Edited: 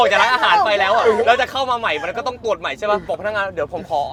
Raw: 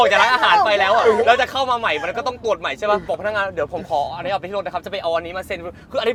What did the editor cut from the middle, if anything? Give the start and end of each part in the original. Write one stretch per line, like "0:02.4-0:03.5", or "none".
none